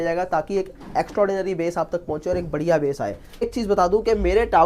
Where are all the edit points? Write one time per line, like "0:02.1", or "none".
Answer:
0:03.5